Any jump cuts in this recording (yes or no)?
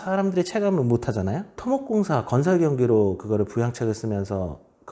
yes